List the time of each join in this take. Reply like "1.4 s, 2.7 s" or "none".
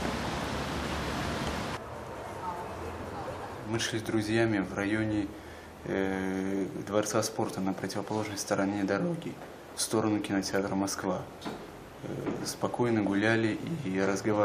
none